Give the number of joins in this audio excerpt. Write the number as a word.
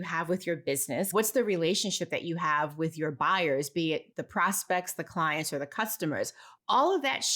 one